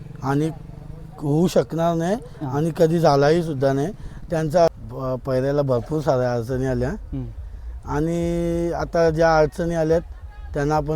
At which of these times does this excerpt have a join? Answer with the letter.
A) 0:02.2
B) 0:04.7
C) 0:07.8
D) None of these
B